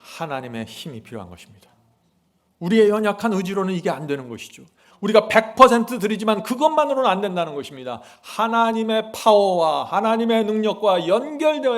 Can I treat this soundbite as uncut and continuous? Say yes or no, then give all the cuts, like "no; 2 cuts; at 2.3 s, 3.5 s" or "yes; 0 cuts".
yes; 0 cuts